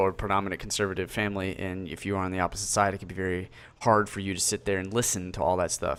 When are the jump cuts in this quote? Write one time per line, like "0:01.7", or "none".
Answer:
none